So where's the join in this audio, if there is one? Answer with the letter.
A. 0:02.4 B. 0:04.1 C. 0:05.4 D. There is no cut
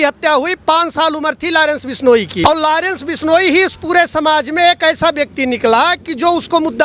A